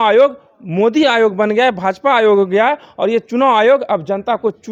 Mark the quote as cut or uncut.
uncut